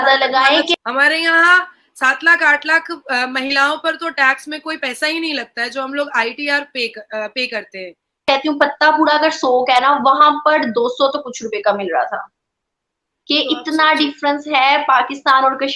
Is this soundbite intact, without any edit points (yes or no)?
no